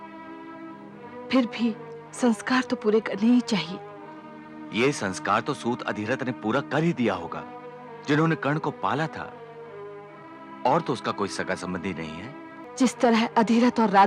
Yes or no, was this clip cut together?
yes